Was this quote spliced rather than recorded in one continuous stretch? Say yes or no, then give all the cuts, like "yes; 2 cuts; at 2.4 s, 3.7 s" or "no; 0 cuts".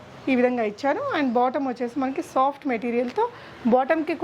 no; 0 cuts